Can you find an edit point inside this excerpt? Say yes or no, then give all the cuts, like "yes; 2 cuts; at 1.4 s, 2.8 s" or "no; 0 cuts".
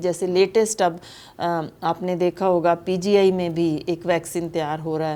no; 0 cuts